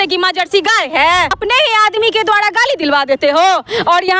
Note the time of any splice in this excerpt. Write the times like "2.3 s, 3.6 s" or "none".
1.3 s